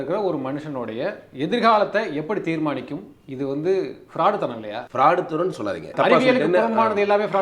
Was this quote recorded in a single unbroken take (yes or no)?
no